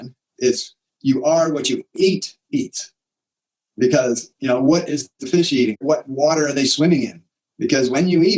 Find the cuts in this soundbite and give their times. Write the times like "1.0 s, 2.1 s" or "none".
5.8 s